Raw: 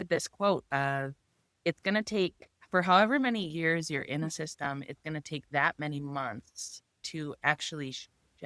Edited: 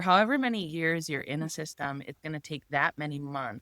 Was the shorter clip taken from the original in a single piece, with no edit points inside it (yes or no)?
yes